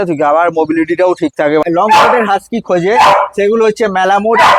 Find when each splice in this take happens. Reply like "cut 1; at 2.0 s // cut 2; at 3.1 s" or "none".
cut 1; at 1.6 s